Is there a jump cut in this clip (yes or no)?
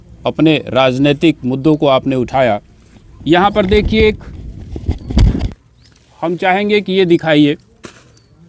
no